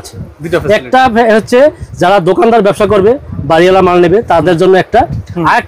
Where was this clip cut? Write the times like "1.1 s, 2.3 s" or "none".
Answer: none